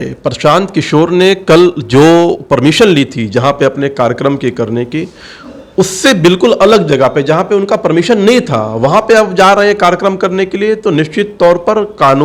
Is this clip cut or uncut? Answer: uncut